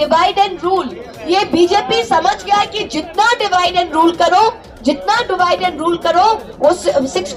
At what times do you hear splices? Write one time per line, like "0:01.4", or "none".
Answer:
none